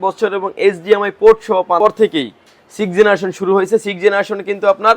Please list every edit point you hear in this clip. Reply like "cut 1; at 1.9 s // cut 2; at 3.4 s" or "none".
cut 1; at 1.8 s

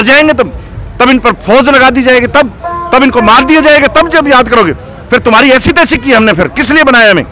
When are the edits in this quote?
none

